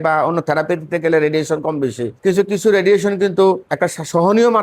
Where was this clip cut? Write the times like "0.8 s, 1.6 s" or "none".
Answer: 2.1 s, 3.7 s